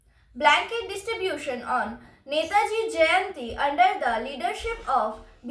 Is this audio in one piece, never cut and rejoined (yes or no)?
yes